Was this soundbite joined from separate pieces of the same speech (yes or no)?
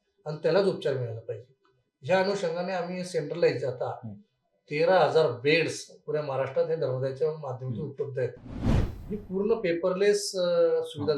yes